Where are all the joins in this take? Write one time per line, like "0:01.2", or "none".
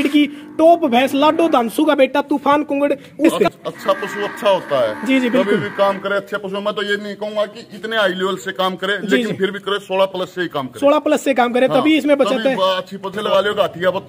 0:03.3
0:13.2

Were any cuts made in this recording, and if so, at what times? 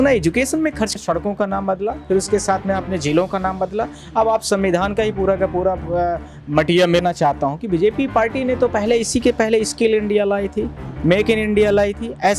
0:00.9
0:07.0

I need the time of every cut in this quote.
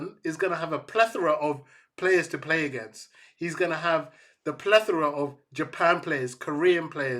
none

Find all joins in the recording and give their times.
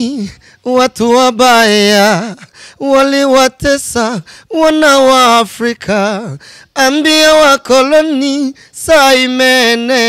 none

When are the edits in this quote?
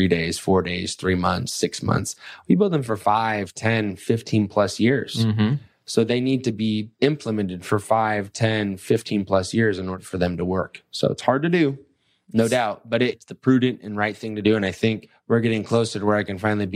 0:06.9
0:10.0
0:13.3
0:15.1

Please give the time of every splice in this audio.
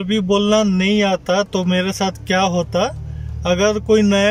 none

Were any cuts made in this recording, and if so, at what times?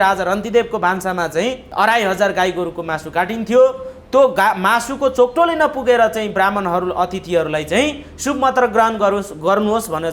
0:01.6

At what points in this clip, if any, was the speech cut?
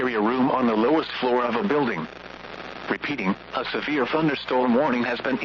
none

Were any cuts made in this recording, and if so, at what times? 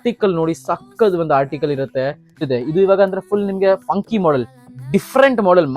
0:02.5

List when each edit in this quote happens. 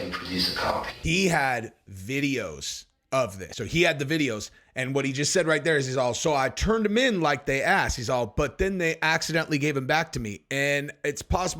0:00.9
0:03.5

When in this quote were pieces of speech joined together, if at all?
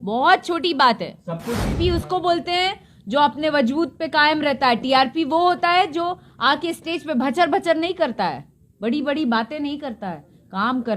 0:01.7

